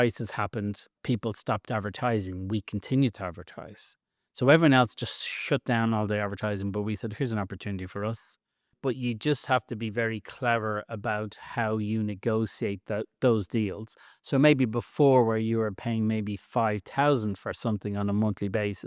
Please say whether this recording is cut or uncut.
cut